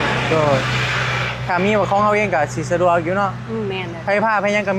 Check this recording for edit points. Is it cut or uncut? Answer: uncut